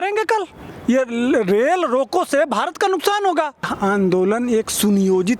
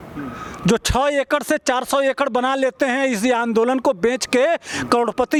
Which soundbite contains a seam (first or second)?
first